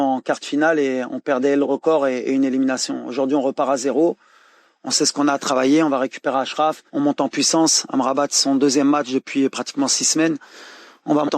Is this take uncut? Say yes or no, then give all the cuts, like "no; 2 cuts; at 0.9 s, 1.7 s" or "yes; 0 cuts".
no; 1 cut; at 6.8 s